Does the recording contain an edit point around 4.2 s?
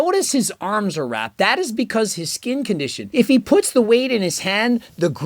no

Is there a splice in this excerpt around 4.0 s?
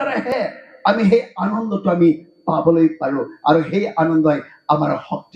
no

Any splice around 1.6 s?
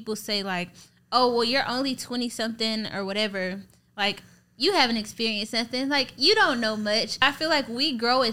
no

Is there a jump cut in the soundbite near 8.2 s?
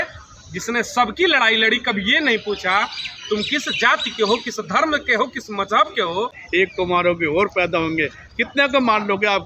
no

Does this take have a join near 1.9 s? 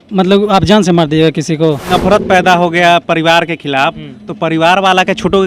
yes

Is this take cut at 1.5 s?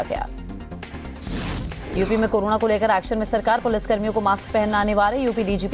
yes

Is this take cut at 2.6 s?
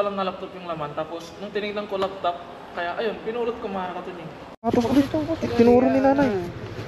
no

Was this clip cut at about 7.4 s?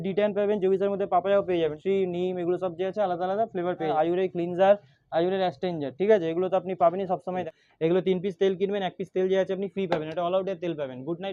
yes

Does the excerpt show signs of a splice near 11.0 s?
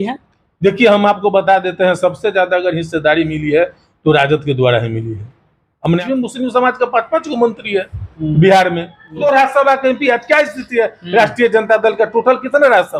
no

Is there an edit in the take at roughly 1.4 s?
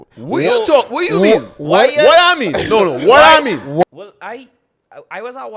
no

